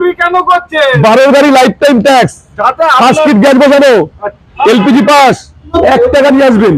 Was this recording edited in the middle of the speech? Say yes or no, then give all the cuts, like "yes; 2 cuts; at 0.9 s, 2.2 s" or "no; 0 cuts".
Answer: yes; 1 cut; at 5.6 s